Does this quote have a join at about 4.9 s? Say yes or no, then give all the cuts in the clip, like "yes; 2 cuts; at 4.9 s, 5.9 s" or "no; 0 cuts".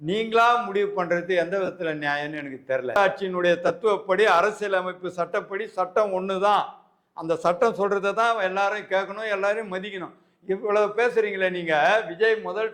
no; 1 cut; at 3.0 s